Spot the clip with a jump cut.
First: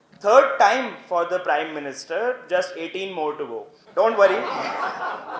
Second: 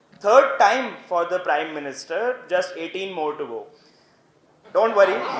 first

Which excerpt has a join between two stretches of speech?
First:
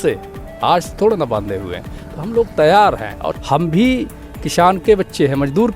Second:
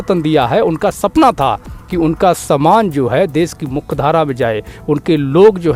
first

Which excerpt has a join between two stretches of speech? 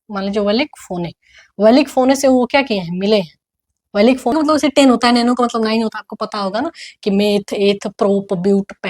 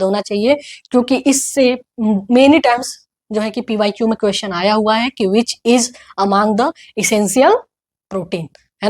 first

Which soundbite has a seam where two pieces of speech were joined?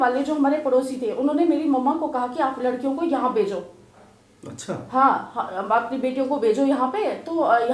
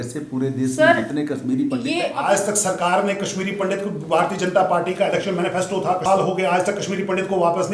second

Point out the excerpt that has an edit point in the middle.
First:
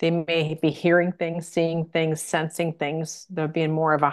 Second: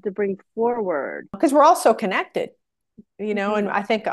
second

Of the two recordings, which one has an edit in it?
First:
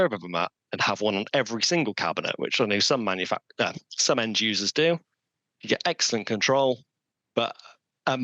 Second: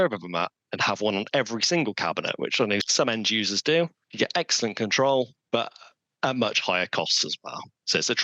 second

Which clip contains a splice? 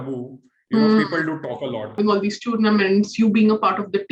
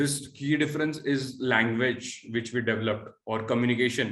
first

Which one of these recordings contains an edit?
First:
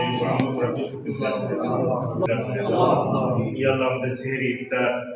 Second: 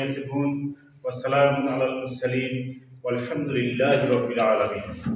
first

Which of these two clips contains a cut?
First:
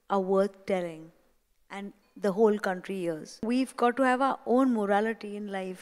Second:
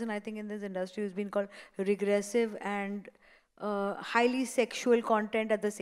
first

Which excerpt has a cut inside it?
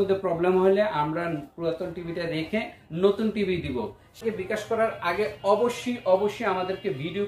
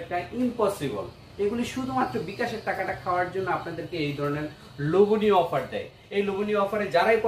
first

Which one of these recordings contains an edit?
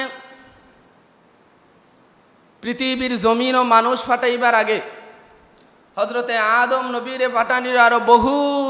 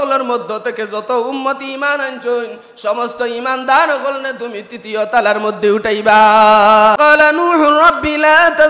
second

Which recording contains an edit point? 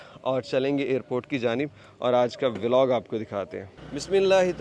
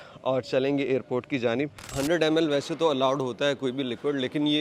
second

